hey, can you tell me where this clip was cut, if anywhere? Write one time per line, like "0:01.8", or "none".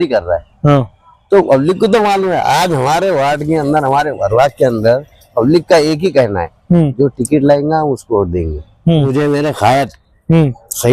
0:09.1